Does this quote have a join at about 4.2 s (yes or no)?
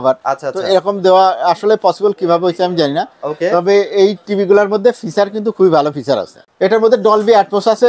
no